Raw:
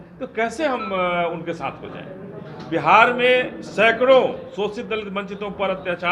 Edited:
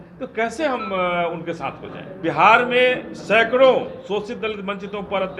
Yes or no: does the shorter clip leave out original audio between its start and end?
yes